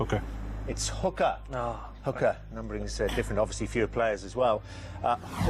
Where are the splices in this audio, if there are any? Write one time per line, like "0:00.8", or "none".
0:03.7